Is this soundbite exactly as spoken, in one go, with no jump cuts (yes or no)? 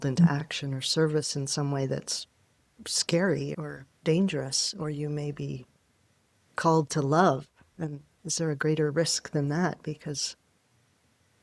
yes